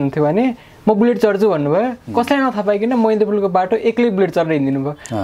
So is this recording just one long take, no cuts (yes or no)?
yes